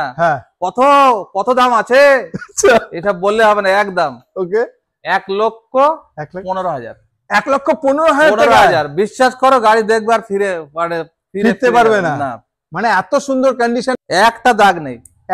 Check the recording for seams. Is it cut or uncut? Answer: uncut